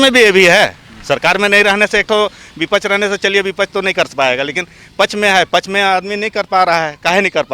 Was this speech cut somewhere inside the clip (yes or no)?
no